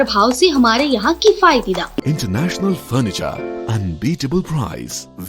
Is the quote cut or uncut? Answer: cut